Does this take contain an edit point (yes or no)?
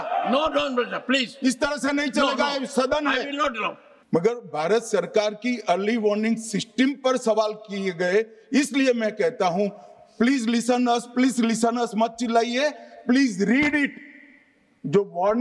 yes